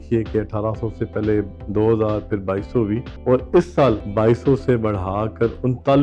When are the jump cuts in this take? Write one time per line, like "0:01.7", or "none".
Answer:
0:01.6
0:03.1
0:04.1